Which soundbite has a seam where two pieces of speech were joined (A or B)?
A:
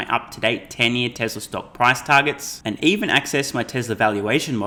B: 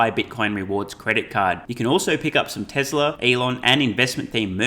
B